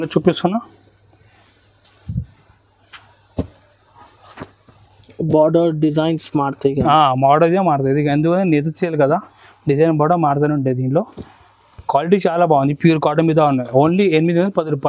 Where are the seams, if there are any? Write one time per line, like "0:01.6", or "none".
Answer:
none